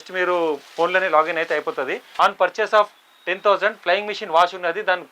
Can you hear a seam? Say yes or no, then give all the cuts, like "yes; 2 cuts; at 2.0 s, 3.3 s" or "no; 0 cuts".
yes; 1 cut; at 2.0 s